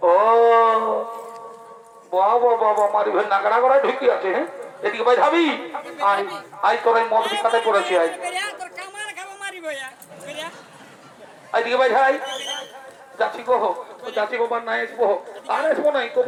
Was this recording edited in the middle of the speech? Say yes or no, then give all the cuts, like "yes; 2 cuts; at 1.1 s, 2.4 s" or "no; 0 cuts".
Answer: no; 0 cuts